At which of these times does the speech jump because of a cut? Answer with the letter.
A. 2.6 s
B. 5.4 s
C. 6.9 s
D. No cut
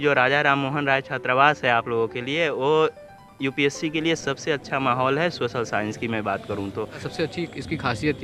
C